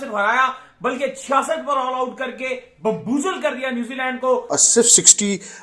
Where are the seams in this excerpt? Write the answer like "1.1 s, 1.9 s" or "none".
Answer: 4.5 s